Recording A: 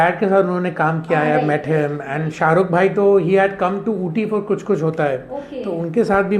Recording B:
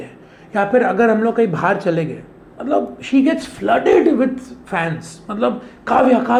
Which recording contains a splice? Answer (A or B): A